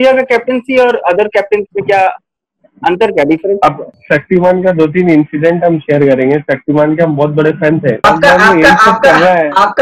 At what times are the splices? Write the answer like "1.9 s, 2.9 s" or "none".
3.9 s, 8.0 s